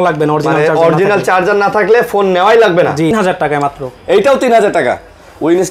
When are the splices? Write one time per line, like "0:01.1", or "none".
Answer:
0:03.1